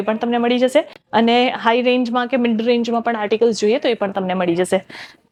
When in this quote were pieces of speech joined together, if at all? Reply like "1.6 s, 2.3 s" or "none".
none